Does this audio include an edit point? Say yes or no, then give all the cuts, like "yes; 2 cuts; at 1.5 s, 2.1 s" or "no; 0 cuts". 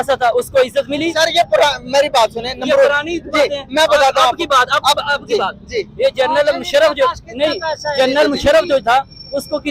no; 0 cuts